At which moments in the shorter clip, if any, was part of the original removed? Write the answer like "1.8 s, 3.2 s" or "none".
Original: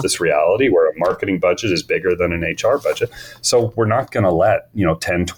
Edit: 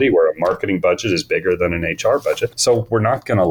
2.5 s